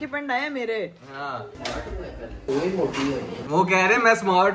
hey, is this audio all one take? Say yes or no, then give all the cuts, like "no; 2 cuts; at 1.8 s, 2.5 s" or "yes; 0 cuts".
no; 2 cuts; at 2.4 s, 3.4 s